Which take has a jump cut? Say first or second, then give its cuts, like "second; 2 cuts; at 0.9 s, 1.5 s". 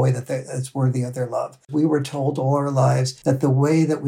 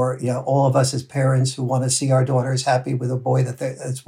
first; 2 cuts; at 1.7 s, 3.1 s